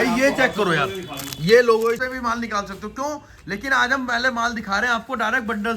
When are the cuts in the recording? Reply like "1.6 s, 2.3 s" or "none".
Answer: 2.0 s